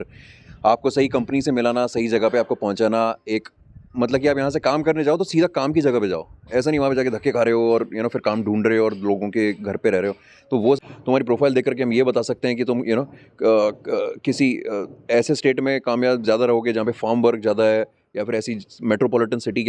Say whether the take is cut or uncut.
cut